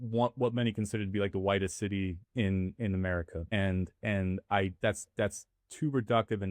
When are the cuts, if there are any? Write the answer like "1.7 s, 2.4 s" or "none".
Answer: 3.4 s, 4.7 s